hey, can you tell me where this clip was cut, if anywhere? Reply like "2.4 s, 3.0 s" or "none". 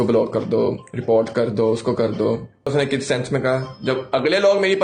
2.7 s